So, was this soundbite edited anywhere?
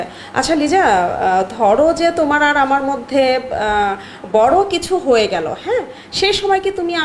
no; 0 cuts

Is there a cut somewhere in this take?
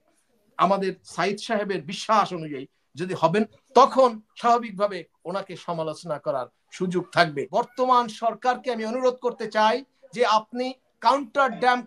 yes; 1 cut; at 7.5 s

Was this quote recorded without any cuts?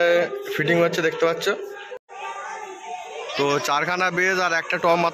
no; 1 cut; at 2.0 s

